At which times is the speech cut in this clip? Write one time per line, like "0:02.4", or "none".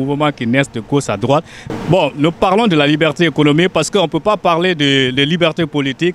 0:01.6

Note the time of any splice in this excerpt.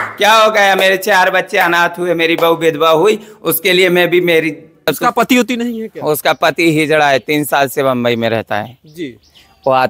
0:04.9

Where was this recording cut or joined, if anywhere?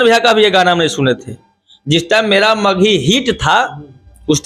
none

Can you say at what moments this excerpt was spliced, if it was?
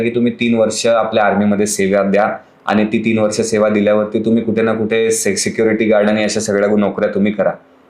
none

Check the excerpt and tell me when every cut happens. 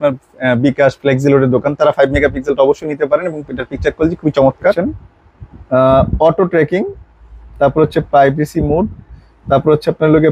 0:04.8

